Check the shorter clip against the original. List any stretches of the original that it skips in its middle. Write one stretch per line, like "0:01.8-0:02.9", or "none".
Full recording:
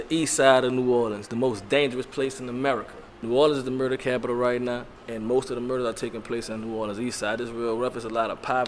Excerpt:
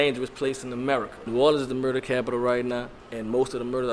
0:02.9-0:03.1